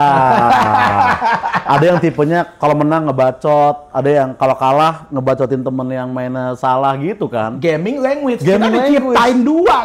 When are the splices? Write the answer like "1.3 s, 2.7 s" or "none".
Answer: none